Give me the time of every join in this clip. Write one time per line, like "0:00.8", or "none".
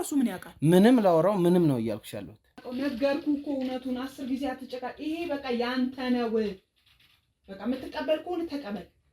0:02.6